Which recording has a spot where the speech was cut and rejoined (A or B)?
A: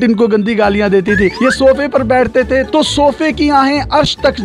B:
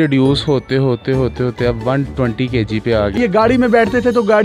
B